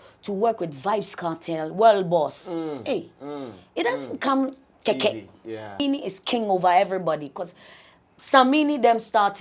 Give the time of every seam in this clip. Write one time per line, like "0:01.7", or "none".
0:05.8